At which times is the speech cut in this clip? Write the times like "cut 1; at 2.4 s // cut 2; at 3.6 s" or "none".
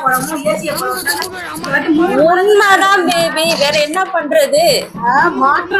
none